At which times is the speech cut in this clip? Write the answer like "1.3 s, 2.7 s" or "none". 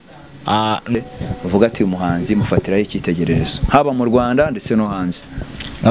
0.9 s